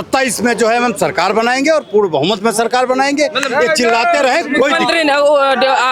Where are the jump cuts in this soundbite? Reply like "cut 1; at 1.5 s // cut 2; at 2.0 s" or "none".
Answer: none